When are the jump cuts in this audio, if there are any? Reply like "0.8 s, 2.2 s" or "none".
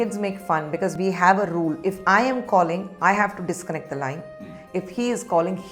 0.9 s, 1.8 s